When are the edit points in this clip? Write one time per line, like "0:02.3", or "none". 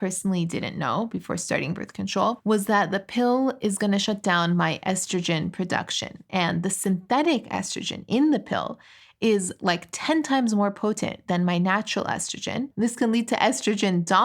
0:02.4
0:12.7